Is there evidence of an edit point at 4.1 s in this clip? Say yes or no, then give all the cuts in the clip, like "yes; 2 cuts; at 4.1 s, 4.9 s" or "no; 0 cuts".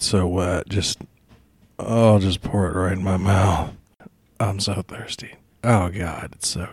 no; 0 cuts